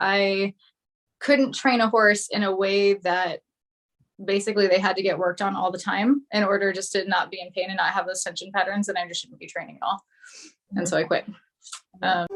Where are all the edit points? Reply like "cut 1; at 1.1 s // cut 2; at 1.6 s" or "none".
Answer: none